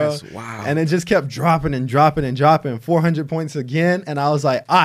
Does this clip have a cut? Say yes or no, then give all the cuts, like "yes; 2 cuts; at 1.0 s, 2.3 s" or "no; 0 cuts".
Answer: no; 0 cuts